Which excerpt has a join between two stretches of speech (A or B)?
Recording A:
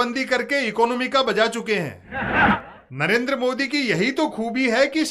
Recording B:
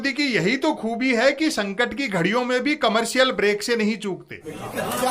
A